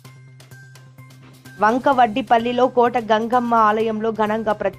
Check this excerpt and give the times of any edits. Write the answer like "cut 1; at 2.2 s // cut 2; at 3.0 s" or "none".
cut 1; at 1.2 s